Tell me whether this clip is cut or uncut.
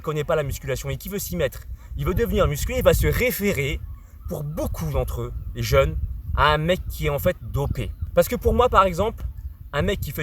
cut